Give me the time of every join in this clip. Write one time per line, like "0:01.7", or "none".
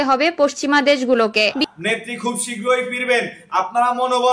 0:01.6